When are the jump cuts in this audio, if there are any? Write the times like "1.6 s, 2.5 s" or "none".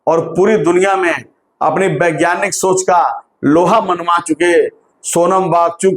none